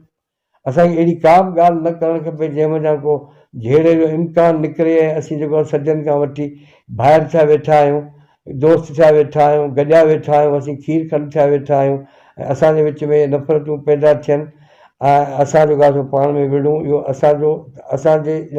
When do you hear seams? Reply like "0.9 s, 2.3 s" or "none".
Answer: none